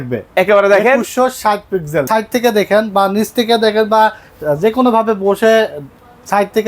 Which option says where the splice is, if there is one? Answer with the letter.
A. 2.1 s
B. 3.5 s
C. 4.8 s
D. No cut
A